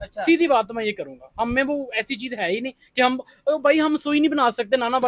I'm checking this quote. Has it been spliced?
no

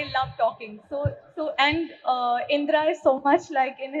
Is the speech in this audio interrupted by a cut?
no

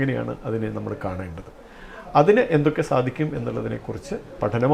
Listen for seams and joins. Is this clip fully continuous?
yes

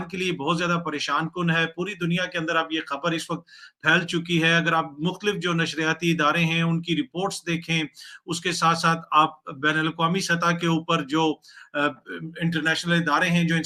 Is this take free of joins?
yes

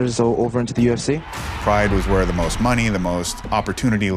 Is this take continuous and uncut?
no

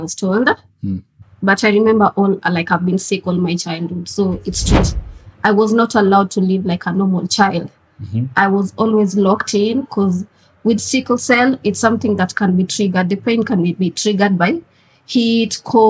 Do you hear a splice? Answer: yes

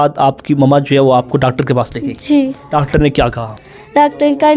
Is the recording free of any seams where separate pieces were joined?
yes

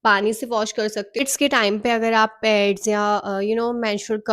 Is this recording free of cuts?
no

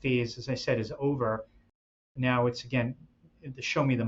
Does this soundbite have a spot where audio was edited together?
no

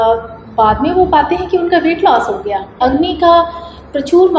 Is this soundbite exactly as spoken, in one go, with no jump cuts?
no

